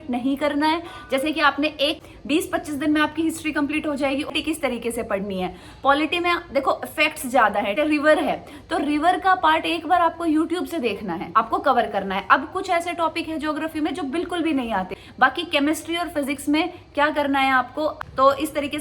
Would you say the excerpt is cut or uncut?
cut